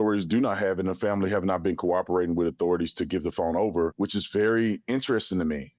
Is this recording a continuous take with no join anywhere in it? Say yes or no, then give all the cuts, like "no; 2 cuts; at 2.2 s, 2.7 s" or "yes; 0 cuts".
no; 1 cut; at 3.9 s